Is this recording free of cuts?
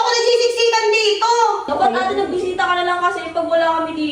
no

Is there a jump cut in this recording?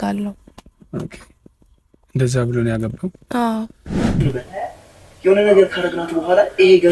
yes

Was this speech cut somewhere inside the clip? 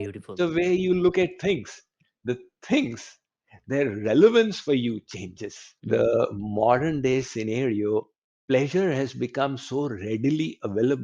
yes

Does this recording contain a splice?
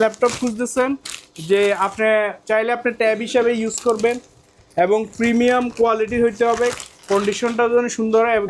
no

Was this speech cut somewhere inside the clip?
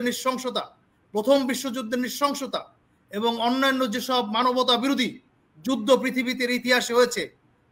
no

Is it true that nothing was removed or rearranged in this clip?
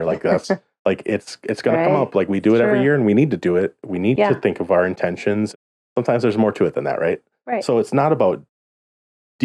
no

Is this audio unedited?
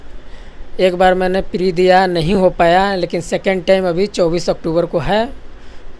yes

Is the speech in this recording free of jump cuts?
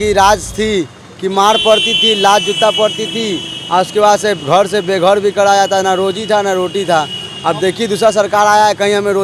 yes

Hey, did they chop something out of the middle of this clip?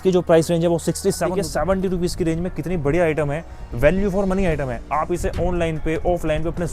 yes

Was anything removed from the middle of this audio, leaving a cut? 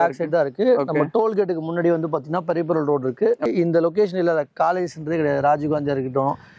yes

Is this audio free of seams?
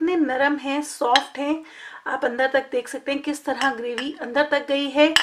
yes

